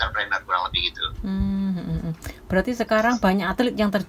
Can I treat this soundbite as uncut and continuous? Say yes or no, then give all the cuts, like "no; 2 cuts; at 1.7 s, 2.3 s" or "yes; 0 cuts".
yes; 0 cuts